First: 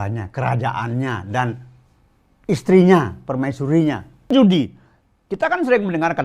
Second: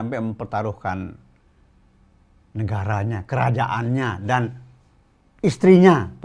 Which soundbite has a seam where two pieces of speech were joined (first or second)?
first